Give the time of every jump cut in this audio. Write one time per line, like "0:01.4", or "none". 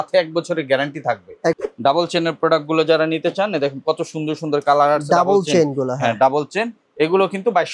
0:01.6